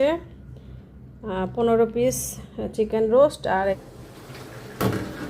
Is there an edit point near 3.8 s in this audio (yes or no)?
yes